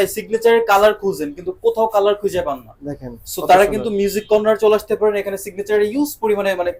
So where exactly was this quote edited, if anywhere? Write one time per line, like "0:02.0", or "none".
none

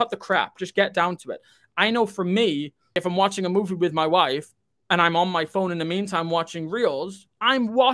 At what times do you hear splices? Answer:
0:03.0

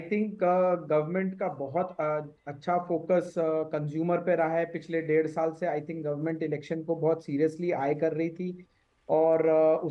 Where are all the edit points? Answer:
none

